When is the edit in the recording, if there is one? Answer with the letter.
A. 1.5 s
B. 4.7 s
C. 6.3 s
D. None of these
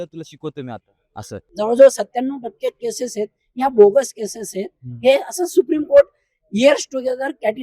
A